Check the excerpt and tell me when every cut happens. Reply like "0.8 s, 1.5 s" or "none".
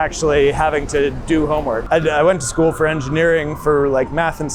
1.8 s